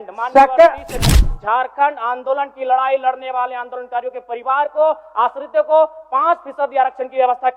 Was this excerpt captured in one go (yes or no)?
no